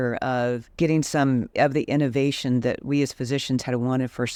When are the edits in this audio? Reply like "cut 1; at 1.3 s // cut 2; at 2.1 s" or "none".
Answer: none